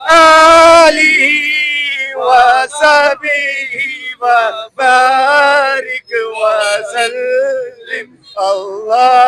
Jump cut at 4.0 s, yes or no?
no